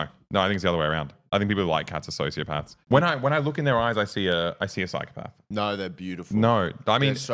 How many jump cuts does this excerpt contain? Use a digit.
0